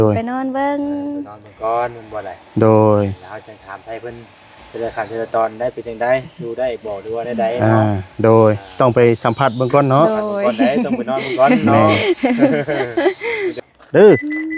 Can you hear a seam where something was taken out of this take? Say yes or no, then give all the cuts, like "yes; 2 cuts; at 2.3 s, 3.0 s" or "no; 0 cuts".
yes; 1 cut; at 13.6 s